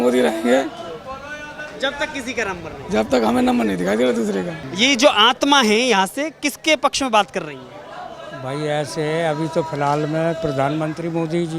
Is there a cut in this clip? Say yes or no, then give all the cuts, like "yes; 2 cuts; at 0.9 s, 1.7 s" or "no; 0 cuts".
yes; 1 cut; at 4.6 s